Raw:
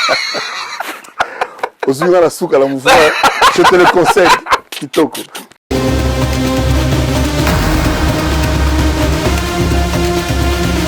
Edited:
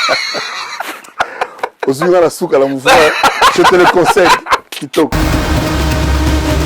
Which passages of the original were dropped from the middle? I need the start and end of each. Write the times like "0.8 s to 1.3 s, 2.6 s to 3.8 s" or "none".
5.1 s to 7.6 s